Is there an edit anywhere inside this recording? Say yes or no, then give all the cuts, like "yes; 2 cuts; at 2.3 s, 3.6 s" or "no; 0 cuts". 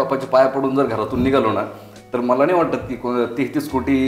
no; 0 cuts